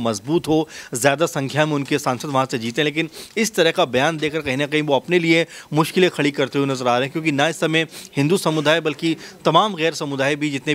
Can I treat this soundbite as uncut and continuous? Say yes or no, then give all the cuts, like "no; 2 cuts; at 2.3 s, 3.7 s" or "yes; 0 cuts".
yes; 0 cuts